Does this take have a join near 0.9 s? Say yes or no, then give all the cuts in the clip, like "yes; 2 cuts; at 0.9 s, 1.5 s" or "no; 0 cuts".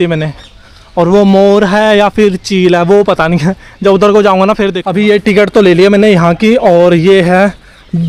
no; 1 cut; at 4.8 s